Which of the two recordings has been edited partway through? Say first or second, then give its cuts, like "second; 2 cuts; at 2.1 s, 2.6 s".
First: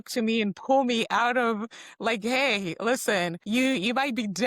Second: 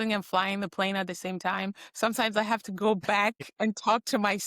first; 1 cut; at 3.4 s